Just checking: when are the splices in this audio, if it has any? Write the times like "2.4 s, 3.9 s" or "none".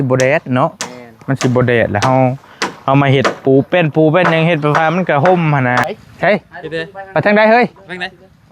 5.8 s